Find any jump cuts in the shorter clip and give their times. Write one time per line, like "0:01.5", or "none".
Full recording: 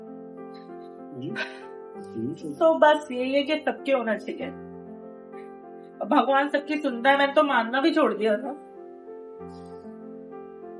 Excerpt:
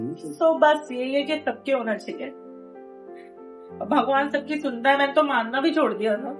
none